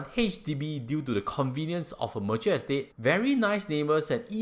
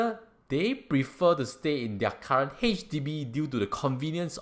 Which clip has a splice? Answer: first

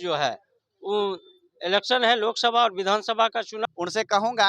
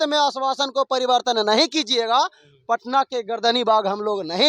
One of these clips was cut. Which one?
first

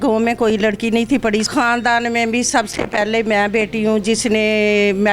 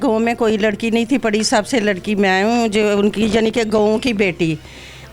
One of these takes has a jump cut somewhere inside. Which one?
first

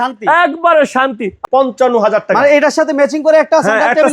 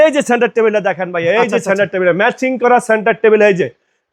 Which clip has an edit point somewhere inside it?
first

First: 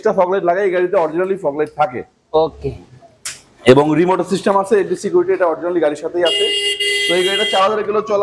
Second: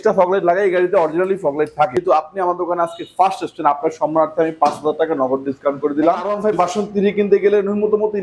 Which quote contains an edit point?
second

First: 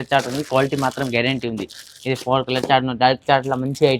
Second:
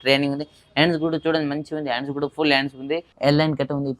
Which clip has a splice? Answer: second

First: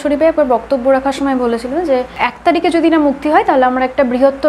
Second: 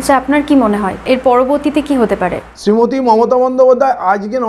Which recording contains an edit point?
second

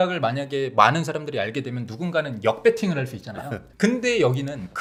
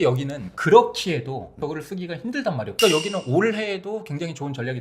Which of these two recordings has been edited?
second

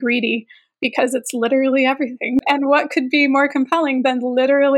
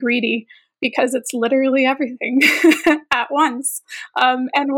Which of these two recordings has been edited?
first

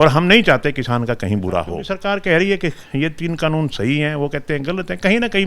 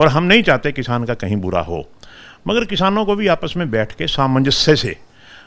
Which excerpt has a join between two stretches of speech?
first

